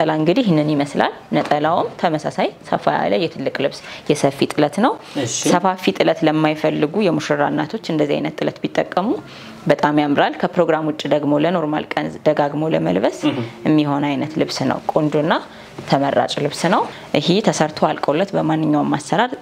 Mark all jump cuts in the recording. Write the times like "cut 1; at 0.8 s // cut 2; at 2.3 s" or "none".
none

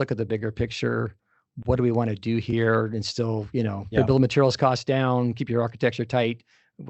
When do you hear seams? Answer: cut 1; at 3.9 s

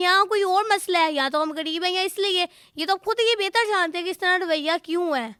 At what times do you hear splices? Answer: none

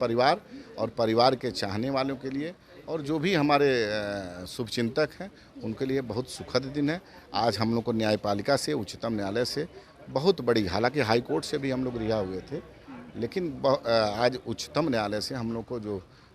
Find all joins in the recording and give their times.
none

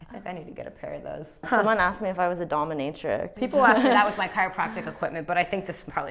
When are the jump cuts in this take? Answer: cut 1; at 1.5 s // cut 2; at 3.3 s

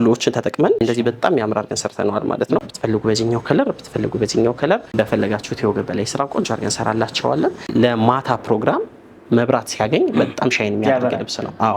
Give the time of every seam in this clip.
cut 1; at 0.8 s // cut 2; at 2.6 s // cut 3; at 4.9 s // cut 4; at 7.7 s

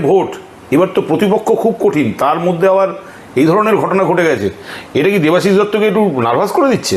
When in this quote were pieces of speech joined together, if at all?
none

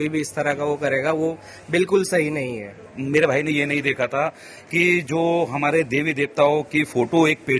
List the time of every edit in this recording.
cut 1; at 2.9 s

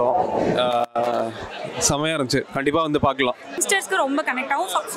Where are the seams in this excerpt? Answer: cut 1; at 3.6 s

